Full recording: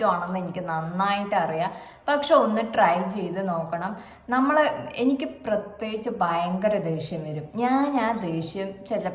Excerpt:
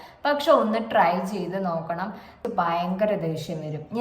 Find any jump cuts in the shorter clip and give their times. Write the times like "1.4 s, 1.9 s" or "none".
2.4 s